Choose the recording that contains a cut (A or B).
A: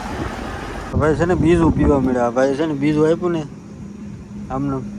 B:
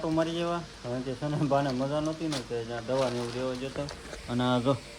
A